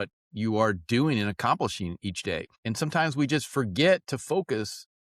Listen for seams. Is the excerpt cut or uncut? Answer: cut